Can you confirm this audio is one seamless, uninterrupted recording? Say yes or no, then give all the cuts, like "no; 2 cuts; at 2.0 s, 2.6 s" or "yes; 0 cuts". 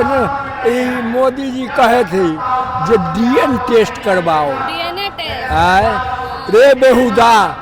yes; 0 cuts